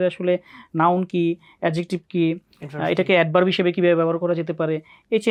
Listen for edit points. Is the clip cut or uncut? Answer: uncut